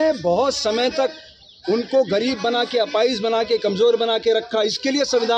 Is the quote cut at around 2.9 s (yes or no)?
no